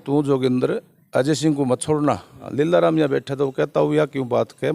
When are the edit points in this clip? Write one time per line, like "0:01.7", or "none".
0:02.4